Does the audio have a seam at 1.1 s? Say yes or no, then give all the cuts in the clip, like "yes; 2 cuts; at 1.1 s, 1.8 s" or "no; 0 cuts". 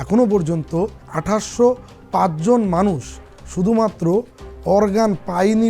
yes; 1 cut; at 1.1 s